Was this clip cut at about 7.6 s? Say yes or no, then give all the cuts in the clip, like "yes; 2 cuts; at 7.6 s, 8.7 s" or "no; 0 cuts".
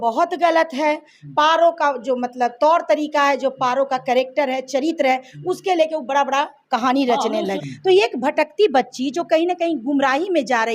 yes; 1 cut; at 7.6 s